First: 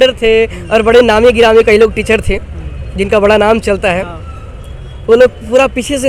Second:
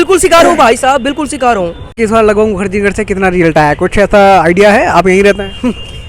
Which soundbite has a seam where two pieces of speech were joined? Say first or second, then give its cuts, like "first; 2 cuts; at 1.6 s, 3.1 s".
second; 1 cut; at 2.0 s